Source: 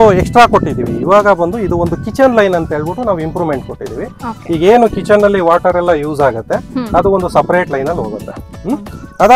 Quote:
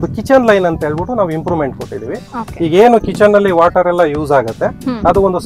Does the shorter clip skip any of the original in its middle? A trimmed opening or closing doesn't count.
no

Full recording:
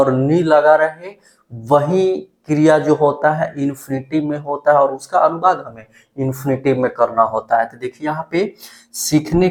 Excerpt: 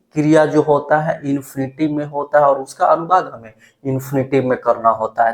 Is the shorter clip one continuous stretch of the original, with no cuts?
yes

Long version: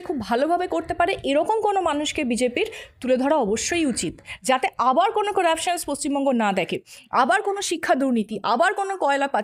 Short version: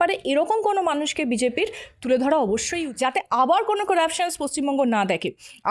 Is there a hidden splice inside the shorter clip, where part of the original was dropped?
yes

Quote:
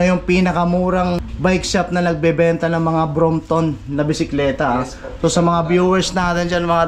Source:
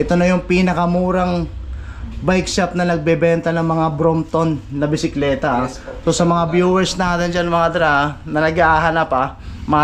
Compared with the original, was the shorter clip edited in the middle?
yes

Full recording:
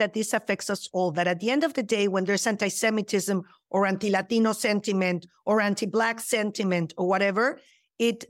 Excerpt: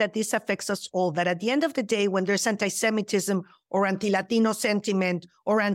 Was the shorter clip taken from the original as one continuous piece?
yes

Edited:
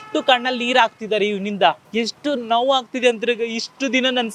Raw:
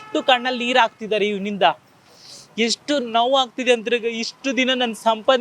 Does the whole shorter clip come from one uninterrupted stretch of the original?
no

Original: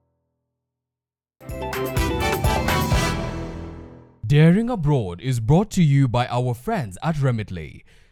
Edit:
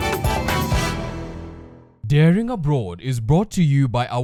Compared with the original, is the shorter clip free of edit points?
yes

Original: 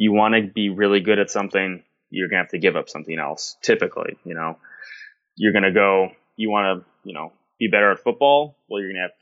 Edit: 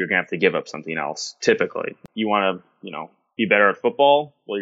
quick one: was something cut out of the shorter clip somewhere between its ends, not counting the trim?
yes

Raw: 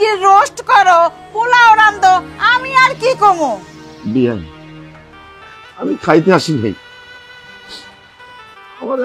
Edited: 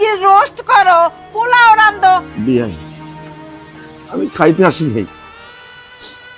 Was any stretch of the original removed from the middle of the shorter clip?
yes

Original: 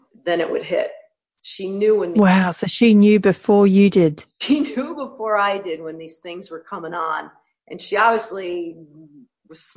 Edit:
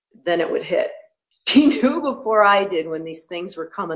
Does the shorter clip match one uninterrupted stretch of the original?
no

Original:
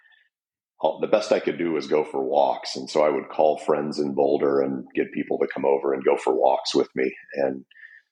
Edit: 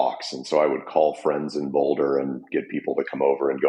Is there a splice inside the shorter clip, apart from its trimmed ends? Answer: no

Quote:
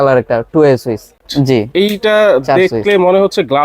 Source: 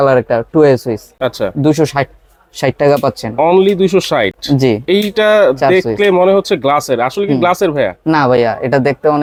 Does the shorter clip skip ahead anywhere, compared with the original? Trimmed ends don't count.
yes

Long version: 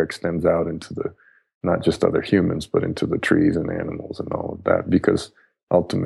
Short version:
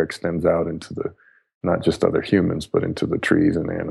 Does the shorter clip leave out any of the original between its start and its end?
no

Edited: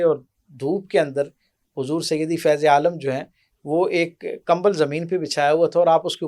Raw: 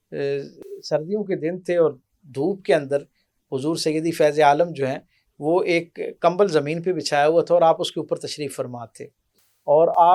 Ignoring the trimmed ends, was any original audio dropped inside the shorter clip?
no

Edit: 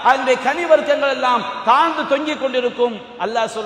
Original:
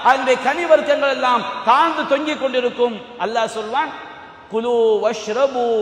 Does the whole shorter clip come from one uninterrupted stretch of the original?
yes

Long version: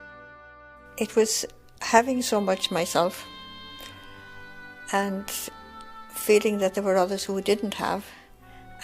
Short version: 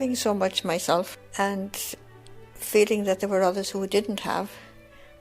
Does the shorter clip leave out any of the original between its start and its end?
yes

